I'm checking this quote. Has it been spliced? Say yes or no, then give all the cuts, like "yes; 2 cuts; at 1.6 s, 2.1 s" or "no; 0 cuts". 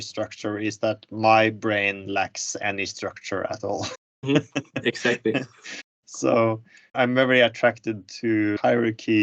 yes; 1 cut; at 6.8 s